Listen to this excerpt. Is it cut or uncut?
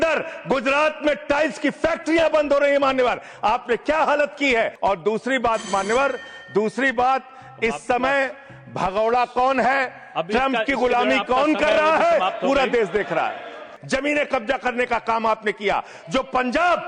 cut